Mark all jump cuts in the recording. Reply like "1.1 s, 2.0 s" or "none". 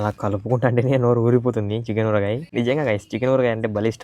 2.4 s